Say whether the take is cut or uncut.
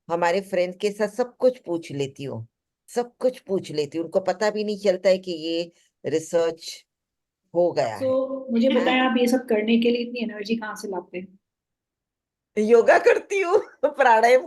cut